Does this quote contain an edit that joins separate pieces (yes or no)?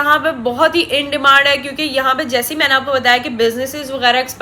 no